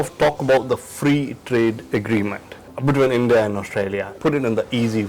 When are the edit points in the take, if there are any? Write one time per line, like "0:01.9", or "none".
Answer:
0:04.1